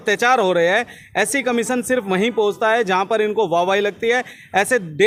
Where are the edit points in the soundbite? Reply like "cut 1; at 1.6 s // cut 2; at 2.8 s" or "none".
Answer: none